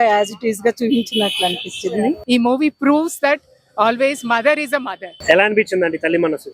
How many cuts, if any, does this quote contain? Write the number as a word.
two